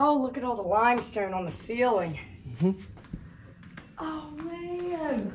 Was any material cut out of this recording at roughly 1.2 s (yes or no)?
no